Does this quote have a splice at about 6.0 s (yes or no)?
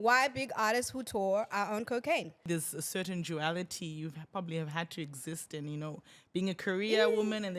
no